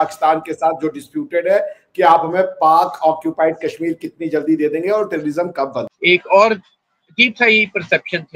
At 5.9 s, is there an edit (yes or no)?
yes